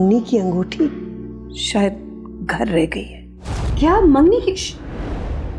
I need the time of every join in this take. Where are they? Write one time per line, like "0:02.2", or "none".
none

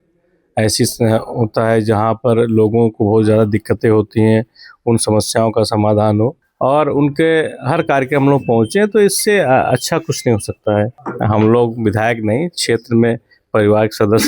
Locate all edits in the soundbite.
0:06.4
0:11.0

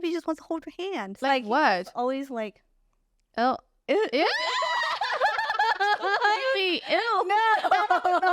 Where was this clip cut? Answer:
0:01.2

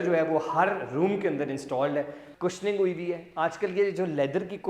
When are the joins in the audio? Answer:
0:02.2

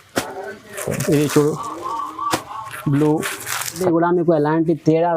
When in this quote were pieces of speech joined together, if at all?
0:03.8

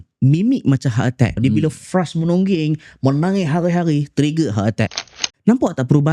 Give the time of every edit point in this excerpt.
0:01.4
0:05.1

